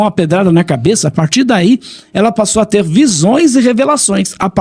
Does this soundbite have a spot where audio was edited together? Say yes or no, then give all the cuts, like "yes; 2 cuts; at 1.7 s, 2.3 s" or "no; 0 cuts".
no; 0 cuts